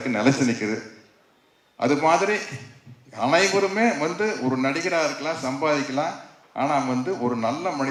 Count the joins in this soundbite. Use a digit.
0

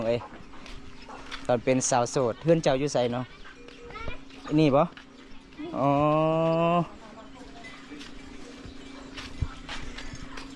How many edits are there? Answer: 0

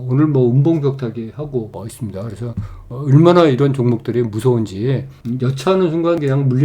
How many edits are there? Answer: 1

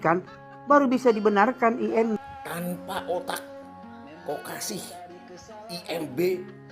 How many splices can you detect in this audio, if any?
1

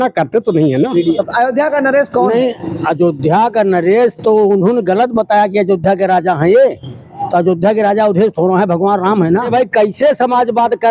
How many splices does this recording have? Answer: 2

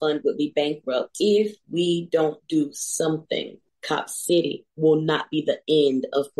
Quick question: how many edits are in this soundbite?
1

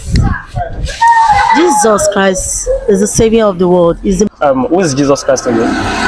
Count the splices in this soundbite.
1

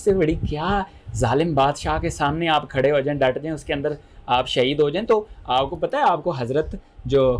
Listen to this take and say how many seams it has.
0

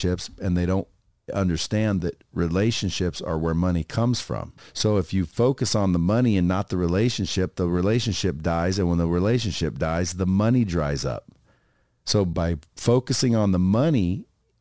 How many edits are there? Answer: 2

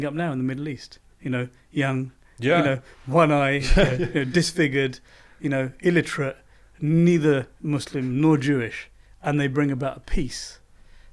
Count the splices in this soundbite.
0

